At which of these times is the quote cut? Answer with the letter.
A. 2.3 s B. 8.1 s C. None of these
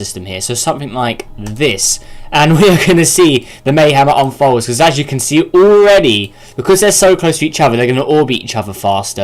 C